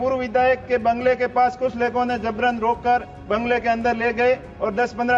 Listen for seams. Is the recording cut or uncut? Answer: uncut